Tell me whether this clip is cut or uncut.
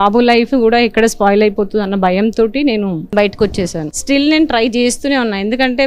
cut